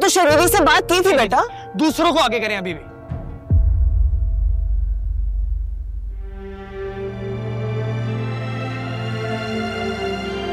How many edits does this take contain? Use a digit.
0